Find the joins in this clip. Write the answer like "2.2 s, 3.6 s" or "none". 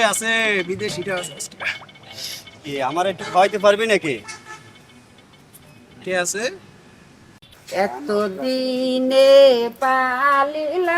7.3 s